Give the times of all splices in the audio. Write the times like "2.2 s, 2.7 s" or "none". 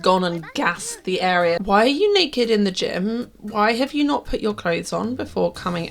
1.6 s